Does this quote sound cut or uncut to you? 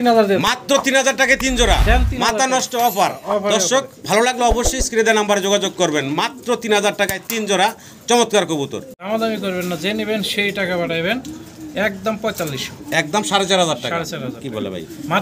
cut